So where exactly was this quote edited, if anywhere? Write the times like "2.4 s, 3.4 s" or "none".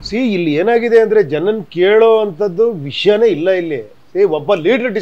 none